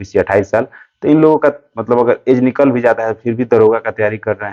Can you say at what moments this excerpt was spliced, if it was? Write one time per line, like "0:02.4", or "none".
none